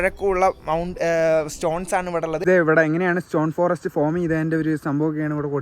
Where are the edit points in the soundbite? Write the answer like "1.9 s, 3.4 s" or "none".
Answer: 2.4 s